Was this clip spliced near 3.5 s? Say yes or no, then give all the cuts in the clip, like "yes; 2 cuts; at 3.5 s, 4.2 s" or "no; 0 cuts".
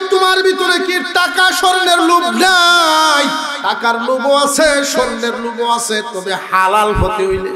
yes; 1 cut; at 3.5 s